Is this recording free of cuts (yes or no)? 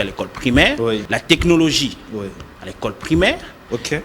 no